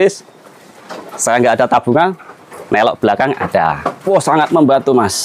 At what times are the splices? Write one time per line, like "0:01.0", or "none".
0:03.9